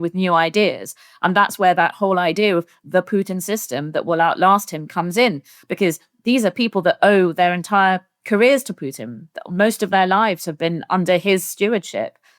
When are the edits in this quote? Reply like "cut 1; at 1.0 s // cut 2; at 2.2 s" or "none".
cut 1; at 11.0 s